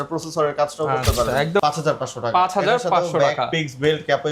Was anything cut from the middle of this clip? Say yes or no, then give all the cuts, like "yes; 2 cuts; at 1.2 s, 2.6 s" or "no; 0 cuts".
yes; 1 cut; at 1.6 s